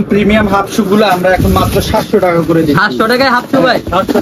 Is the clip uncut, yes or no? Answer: yes